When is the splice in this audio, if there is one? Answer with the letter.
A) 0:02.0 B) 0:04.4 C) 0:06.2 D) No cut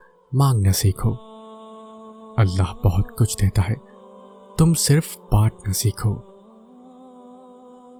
D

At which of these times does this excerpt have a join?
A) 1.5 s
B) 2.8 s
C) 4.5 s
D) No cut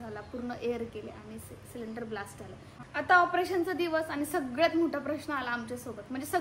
B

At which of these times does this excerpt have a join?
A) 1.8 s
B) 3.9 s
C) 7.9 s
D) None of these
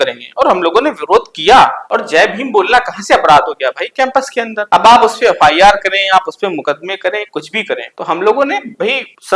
D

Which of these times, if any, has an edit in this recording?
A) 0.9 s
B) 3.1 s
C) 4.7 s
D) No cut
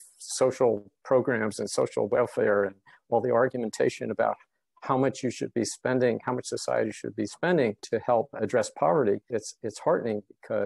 D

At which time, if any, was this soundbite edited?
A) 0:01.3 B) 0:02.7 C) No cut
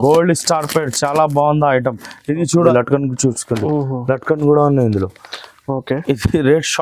B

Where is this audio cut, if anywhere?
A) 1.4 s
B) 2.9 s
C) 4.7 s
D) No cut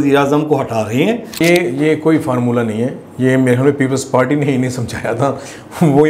A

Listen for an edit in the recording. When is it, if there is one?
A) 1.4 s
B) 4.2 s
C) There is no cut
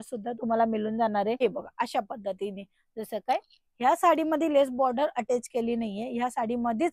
A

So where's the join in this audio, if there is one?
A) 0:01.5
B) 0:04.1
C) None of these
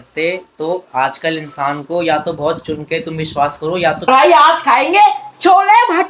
B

